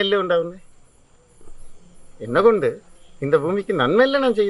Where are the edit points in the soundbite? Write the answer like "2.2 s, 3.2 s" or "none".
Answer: none

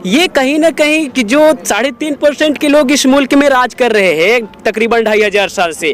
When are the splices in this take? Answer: none

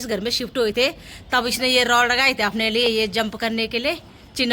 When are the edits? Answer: none

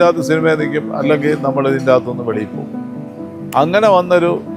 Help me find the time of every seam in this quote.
none

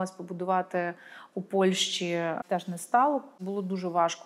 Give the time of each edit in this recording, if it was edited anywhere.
2.4 s, 3.3 s

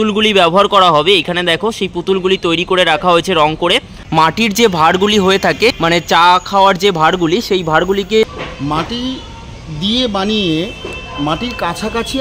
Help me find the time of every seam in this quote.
4.0 s, 5.8 s, 8.3 s

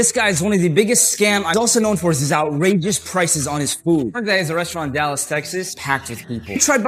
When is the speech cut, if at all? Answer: 1.5 s, 5.8 s

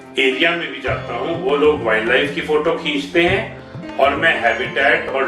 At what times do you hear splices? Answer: none

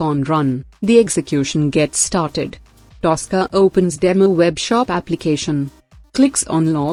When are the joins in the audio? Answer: none

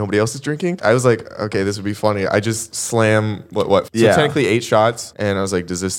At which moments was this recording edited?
0.8 s, 3.9 s, 5.1 s

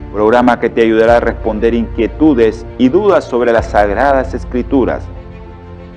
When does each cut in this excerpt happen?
none

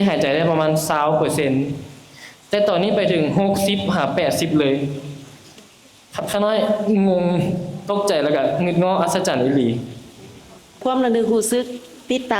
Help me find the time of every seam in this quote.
none

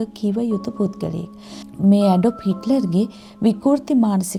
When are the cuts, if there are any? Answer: none

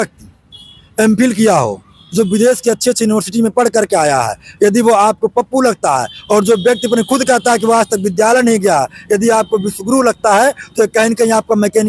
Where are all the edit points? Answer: none

